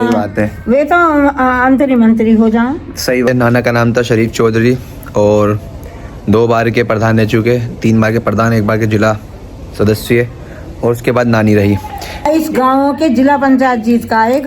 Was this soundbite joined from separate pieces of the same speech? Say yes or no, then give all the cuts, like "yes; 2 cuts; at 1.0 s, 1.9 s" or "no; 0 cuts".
yes; 2 cuts; at 3.3 s, 12.3 s